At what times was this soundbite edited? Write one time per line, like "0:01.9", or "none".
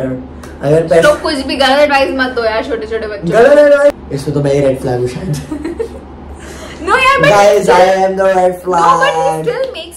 0:04.0